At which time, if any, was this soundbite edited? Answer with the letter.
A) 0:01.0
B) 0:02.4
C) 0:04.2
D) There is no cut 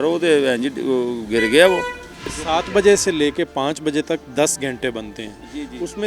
B